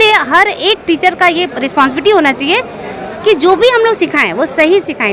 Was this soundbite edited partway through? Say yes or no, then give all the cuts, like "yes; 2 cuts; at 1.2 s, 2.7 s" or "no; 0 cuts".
no; 0 cuts